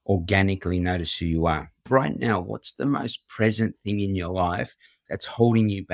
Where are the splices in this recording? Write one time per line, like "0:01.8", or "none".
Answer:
0:01.7